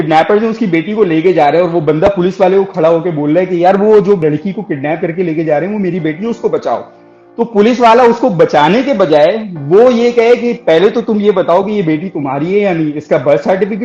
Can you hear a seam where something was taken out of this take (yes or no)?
yes